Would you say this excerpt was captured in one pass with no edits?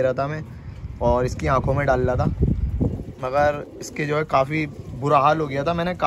yes; 0 cuts

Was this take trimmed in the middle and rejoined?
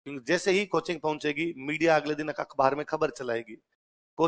no; 0 cuts

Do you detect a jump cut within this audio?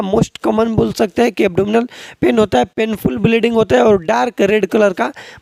no; 0 cuts

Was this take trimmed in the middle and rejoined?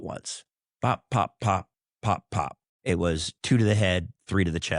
yes; 1 cut; at 2.7 s

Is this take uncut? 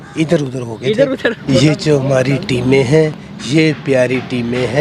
no; 1 cut; at 1.4 s

